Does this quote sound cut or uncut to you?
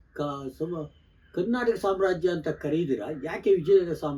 uncut